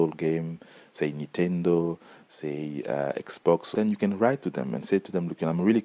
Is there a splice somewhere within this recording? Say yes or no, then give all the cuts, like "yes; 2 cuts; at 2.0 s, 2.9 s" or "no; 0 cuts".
yes; 1 cut; at 3.7 s